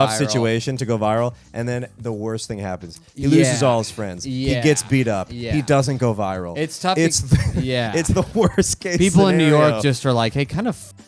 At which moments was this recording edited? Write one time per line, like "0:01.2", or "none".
none